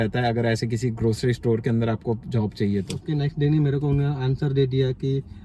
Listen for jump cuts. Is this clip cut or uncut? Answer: cut